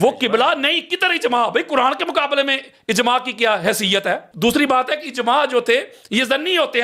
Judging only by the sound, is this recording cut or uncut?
cut